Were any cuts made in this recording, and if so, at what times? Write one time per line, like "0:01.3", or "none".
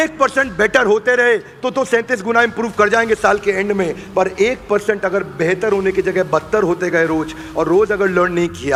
none